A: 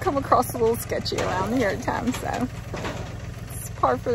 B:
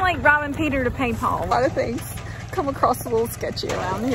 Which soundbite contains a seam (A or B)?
B